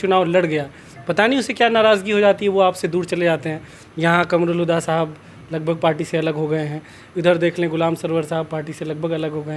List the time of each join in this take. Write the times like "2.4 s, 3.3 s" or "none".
none